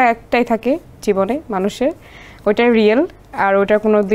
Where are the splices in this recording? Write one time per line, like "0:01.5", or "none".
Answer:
none